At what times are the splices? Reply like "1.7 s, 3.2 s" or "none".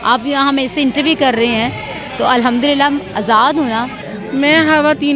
4.2 s